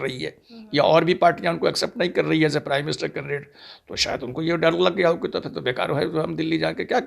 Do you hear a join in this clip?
no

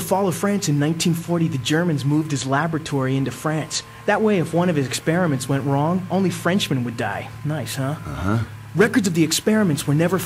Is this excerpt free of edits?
yes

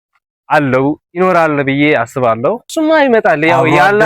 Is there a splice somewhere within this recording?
yes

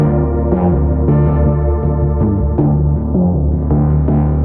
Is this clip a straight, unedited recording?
yes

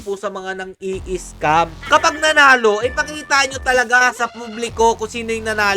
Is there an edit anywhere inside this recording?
yes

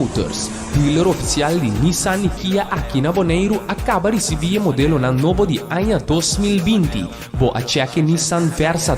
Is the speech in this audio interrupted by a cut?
yes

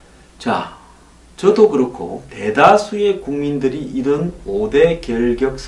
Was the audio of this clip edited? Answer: no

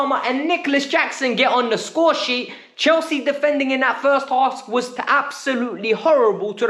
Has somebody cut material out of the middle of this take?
no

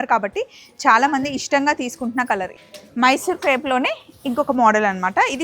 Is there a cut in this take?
yes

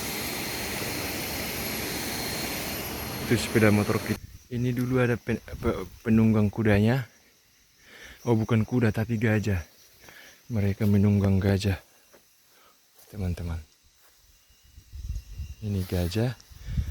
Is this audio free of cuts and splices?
no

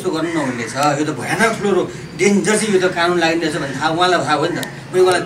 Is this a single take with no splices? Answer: yes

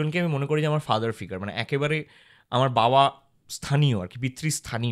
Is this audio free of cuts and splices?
yes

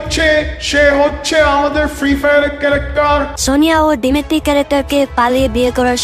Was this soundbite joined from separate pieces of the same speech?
yes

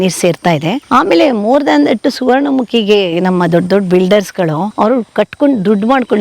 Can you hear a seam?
yes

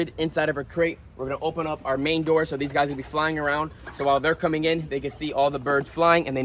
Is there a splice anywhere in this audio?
no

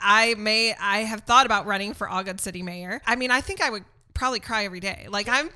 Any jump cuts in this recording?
yes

